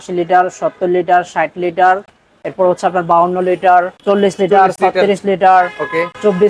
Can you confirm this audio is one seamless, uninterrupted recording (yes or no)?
yes